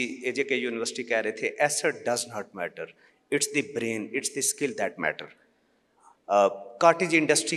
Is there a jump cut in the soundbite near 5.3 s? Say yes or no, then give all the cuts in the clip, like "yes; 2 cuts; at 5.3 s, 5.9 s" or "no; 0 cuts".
no; 0 cuts